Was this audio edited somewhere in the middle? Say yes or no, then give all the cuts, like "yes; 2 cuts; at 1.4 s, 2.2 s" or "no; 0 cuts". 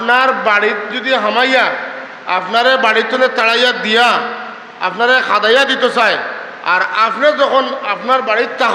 no; 0 cuts